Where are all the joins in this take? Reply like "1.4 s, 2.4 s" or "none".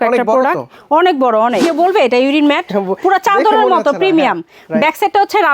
1.7 s